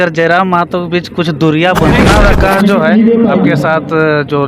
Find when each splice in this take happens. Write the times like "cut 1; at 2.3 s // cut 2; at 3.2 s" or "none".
cut 1; at 2.0 s